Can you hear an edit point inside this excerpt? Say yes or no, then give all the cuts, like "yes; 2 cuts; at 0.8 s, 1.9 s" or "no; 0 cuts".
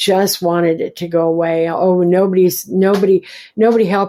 no; 0 cuts